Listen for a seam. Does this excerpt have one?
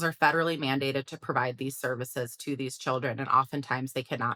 no; 0 cuts

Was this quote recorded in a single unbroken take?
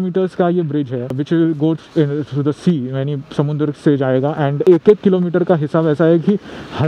no; 1 cut; at 1.2 s

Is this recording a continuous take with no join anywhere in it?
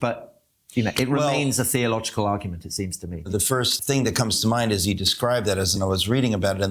no; 1 cut; at 3.3 s

